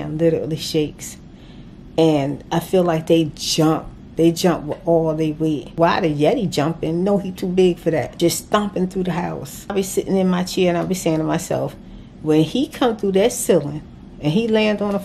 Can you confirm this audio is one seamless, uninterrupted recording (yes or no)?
no